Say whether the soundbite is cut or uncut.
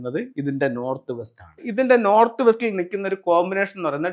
cut